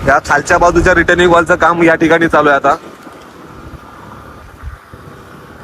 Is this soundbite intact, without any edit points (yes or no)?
yes